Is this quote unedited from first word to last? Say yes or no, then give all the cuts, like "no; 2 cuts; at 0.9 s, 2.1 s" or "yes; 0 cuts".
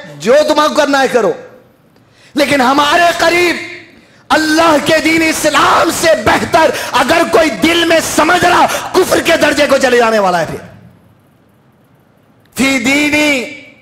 yes; 0 cuts